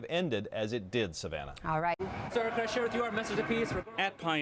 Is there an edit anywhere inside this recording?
yes; 1 cut; at 2.0 s

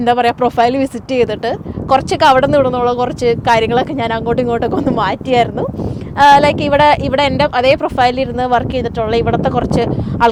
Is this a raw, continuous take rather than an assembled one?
yes; 0 cuts

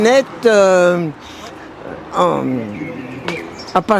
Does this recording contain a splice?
no; 0 cuts

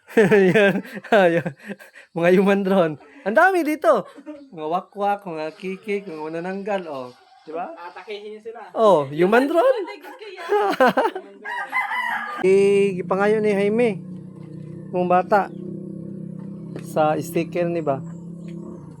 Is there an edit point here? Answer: yes; 1 cut; at 12.4 s

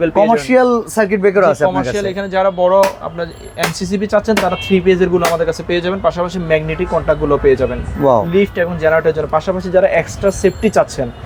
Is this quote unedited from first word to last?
yes; 0 cuts

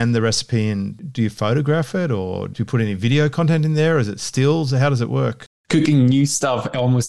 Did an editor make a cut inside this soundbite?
yes; 2 cuts; at 1.0 s, 5.5 s

